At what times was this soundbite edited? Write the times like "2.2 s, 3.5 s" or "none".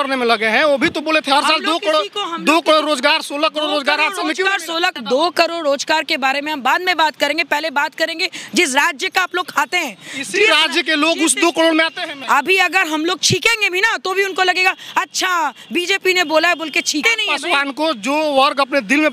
5.0 s, 12.2 s, 17.0 s